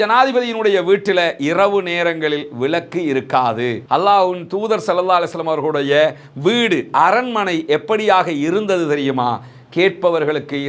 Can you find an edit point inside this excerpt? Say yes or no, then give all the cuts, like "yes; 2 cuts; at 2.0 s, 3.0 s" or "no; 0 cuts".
yes; 1 cut; at 3.8 s